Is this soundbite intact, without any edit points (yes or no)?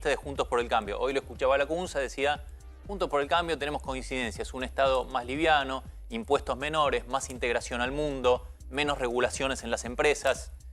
yes